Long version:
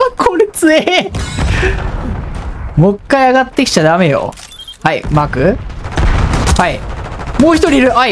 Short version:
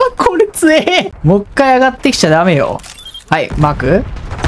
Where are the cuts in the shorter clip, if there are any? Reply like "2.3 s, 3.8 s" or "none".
1.1 s